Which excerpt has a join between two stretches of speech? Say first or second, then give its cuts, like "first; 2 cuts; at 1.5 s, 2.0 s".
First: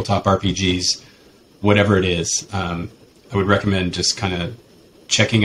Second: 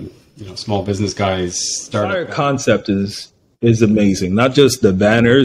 second; 1 cut; at 2.2 s